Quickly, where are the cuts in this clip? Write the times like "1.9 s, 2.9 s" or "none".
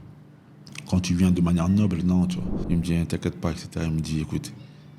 2.5 s